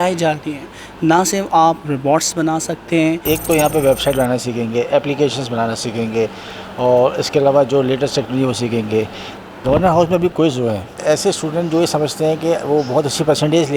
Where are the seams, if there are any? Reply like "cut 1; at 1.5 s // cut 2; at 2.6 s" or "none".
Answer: cut 1; at 3.2 s // cut 2; at 9.4 s